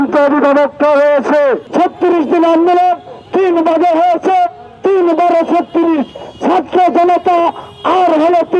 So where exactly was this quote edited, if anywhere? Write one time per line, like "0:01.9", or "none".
0:01.6

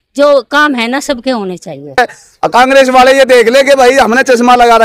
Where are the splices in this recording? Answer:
0:02.0

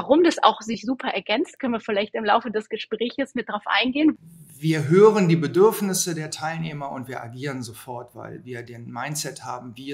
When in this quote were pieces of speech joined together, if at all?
0:04.2

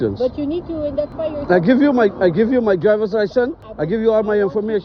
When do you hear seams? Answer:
none

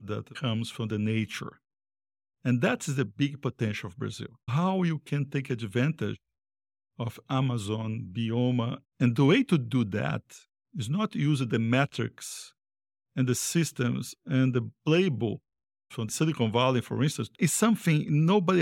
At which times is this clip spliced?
none

